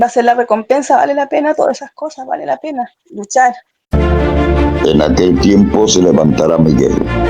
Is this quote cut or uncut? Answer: cut